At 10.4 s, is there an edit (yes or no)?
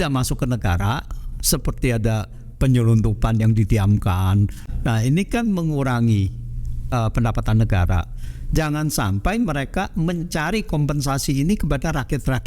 no